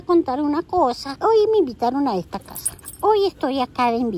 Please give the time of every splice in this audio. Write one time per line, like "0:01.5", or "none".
0:01.1